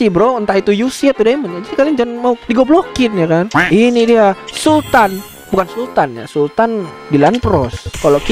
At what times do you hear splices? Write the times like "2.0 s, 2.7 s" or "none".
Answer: 3.6 s